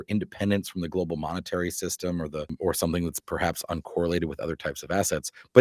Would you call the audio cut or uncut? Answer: cut